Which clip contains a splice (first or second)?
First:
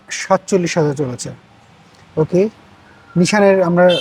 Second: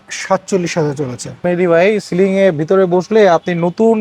second